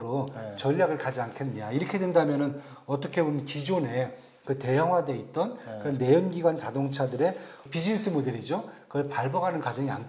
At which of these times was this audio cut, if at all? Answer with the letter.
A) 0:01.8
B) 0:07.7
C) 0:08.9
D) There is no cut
B